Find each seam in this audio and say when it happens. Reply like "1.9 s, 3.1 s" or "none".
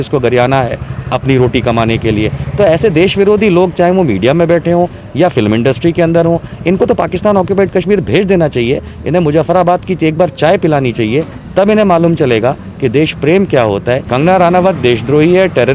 14.0 s